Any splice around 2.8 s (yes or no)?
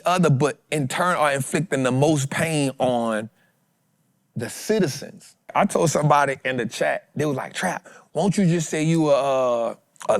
no